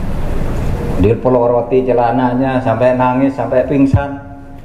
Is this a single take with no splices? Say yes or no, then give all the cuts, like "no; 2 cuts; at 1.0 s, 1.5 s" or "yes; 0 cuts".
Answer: yes; 0 cuts